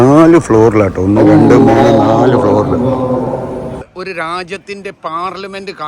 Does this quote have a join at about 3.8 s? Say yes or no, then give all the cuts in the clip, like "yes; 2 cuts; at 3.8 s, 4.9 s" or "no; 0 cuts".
yes; 1 cut; at 3.8 s